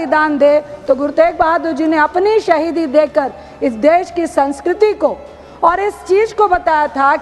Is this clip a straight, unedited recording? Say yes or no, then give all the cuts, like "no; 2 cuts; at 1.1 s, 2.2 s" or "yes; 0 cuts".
yes; 0 cuts